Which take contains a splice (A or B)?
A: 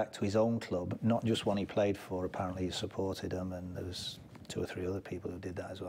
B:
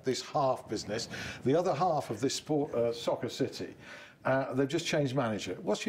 A